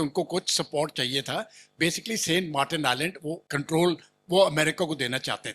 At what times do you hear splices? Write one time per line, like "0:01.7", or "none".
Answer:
0:03.4